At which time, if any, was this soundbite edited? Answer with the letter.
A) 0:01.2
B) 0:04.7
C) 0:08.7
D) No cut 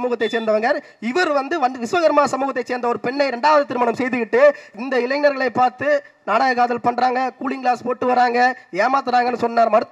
B